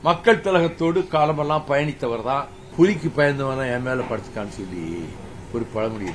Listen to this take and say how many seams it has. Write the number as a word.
one